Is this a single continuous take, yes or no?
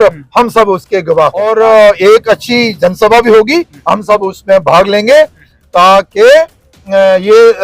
no